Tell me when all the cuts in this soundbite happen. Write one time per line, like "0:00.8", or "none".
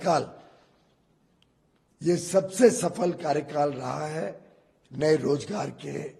none